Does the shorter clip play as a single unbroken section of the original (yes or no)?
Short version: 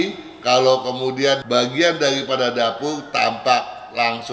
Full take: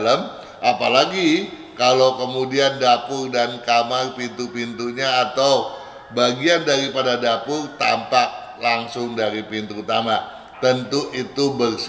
no